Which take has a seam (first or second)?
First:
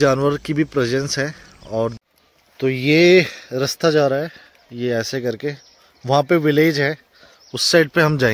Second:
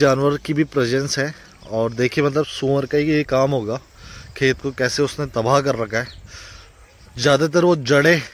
first